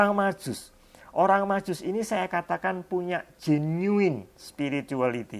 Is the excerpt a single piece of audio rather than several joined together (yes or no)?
yes